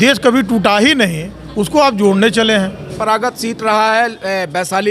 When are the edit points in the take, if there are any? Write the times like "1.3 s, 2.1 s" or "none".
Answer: 2.8 s